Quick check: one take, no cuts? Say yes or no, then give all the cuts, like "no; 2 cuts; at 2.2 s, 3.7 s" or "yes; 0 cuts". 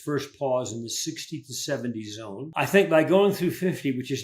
no; 1 cut; at 2.4 s